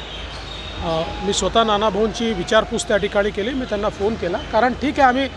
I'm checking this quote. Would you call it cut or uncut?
uncut